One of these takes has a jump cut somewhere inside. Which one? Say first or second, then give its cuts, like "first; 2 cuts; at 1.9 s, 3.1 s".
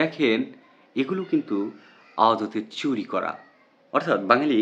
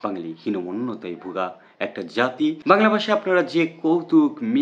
second; 1 cut; at 2.6 s